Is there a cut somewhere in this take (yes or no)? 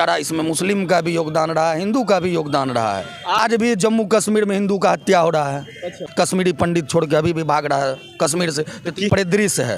yes